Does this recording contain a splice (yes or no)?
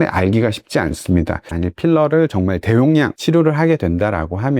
yes